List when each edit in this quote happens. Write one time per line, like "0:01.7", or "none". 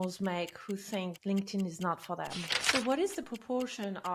0:01.1
0:02.5